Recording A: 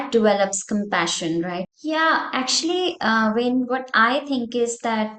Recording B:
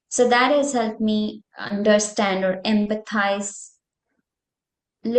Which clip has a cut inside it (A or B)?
A